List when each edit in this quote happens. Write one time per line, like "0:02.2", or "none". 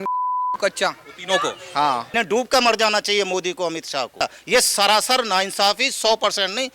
0:02.1
0:04.4